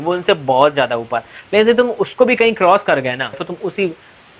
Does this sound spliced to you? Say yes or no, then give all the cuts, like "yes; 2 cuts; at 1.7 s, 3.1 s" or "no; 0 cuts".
yes; 1 cut; at 3.5 s